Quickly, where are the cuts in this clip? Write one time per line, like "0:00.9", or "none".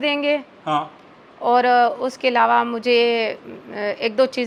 none

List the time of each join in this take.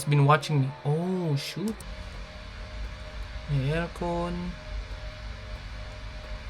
0:01.8

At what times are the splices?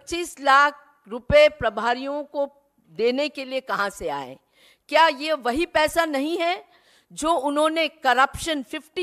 none

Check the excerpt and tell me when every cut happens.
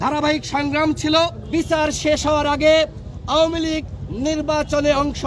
0:01.4

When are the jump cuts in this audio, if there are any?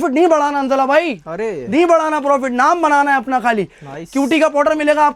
none

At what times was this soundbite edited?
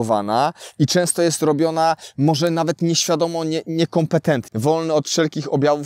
0:04.5

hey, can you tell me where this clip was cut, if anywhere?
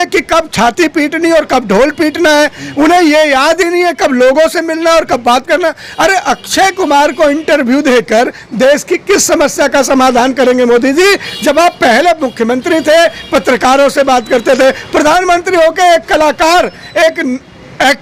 none

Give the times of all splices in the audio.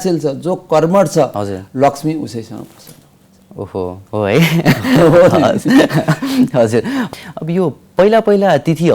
0:07.1

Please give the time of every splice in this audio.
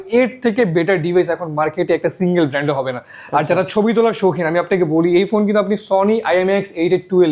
none

